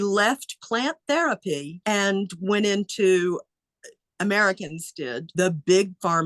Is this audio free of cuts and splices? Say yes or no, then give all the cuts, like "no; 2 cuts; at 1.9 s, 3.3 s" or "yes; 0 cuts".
no; 2 cuts; at 1.8 s, 5.3 s